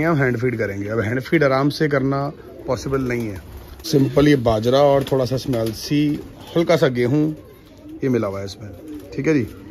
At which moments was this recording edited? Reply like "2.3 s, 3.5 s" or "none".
3.8 s